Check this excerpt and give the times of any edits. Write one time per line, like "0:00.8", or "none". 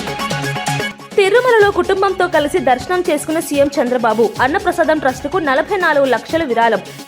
0:00.9